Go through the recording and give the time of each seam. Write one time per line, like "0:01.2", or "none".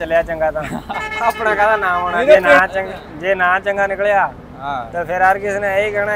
0:02.6